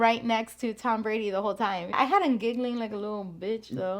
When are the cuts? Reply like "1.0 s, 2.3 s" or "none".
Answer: 1.9 s